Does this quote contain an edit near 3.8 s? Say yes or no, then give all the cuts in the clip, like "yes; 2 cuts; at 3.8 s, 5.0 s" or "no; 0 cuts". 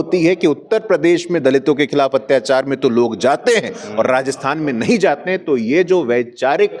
no; 0 cuts